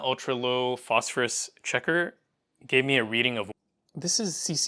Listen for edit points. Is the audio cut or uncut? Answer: cut